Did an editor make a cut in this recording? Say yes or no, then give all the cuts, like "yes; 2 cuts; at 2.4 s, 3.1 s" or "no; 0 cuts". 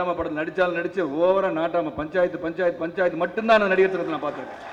no; 0 cuts